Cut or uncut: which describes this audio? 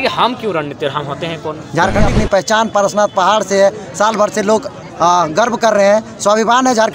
cut